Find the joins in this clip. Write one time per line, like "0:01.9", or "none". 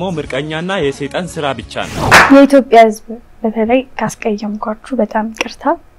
0:02.1